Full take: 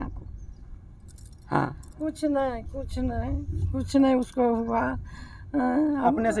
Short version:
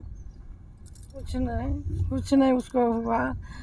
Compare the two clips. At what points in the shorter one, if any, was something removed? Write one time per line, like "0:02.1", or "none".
0:01.1